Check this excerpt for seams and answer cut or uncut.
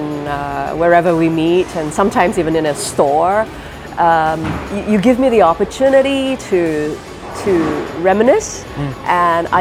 uncut